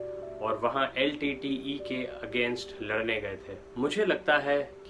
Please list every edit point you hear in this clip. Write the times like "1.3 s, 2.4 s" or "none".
3.5 s